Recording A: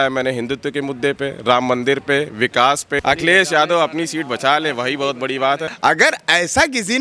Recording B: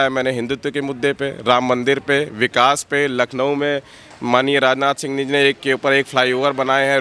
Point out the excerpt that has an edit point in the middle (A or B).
A